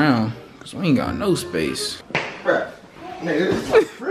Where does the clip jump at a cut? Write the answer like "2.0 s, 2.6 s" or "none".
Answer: 2.0 s